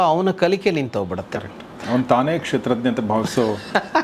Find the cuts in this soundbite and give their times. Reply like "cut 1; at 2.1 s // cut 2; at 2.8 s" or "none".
none